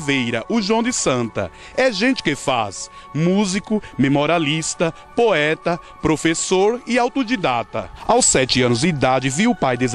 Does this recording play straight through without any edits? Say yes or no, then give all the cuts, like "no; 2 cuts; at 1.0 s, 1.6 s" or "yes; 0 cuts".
no; 1 cut; at 7.7 s